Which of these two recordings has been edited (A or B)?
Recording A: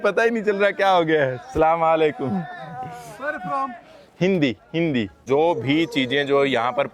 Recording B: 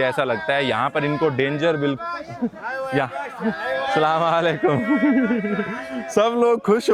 A